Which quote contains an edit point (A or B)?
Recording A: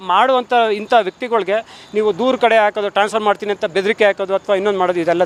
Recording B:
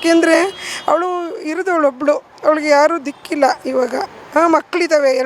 B